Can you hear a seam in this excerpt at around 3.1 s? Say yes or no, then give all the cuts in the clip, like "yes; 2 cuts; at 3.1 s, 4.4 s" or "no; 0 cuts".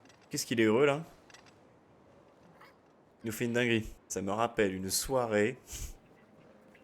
yes; 2 cuts; at 3.1 s, 4.0 s